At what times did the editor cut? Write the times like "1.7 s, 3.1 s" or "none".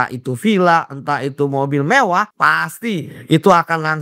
2.3 s